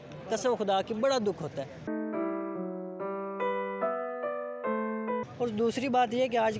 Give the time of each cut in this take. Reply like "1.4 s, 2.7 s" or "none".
1.9 s, 5.3 s